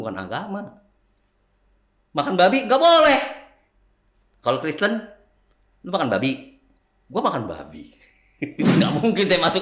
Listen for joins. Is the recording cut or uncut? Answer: cut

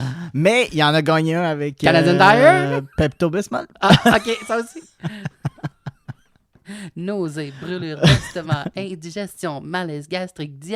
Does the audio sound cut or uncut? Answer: uncut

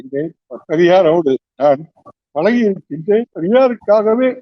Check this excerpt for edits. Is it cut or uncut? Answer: cut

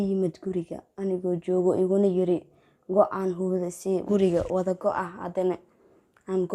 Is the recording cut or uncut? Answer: cut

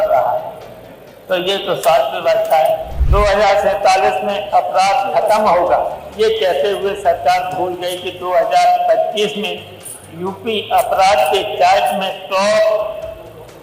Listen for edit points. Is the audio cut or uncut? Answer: cut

